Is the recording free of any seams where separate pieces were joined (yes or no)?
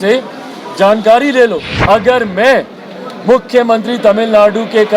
no